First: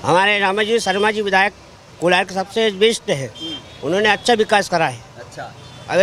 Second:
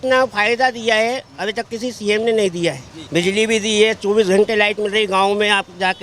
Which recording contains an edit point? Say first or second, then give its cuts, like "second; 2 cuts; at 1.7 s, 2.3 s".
second; 1 cut; at 2.9 s